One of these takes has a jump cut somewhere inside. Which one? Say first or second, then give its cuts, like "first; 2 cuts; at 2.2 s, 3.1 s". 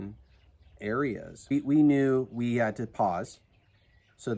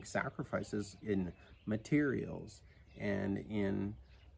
first; 1 cut; at 1.5 s